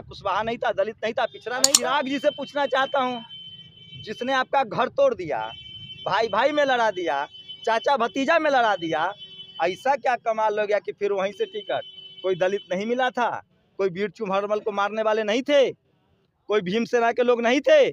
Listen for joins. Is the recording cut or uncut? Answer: cut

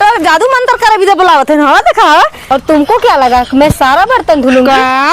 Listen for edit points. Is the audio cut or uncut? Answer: cut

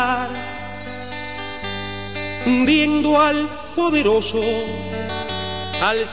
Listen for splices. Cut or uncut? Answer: cut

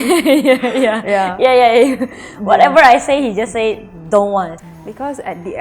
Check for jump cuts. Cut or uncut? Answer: cut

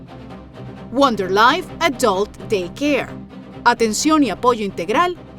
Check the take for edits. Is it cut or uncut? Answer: cut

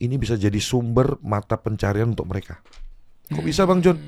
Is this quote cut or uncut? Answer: uncut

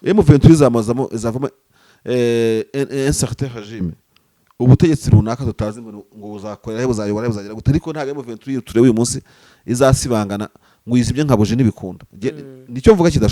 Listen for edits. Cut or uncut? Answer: uncut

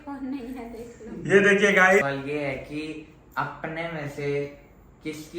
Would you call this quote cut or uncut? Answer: cut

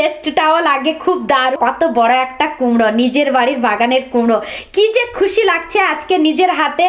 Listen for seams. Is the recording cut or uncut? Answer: cut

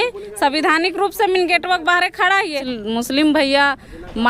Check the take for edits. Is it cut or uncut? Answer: cut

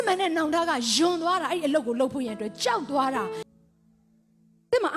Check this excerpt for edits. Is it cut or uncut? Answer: cut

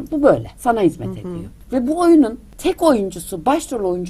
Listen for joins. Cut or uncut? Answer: cut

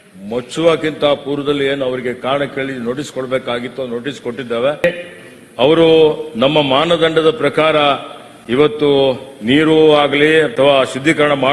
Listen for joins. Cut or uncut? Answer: cut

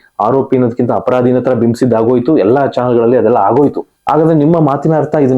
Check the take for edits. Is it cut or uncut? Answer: cut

